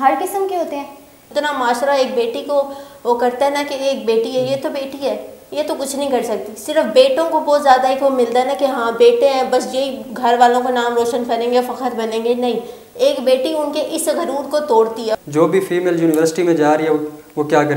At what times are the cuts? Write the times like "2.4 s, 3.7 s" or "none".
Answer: 1.2 s, 15.2 s